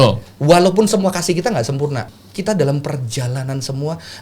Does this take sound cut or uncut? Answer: cut